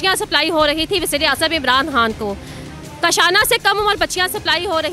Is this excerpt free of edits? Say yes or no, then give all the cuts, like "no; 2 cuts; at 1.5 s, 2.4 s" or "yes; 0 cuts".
yes; 0 cuts